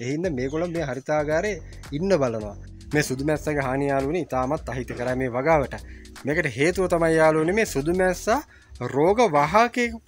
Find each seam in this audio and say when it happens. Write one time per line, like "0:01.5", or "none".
0:02.7